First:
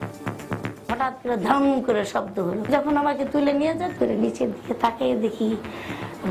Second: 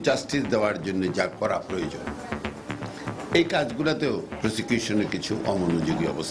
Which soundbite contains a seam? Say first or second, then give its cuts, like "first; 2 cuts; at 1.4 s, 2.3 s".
first; 2 cuts; at 0.9 s, 2.6 s